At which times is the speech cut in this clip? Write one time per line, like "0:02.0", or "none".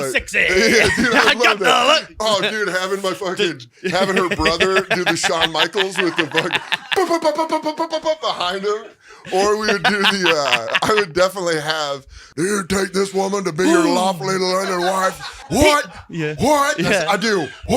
0:12.2
0:15.4